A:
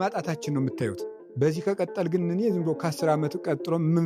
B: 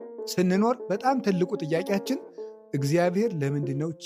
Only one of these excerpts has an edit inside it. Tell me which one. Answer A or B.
A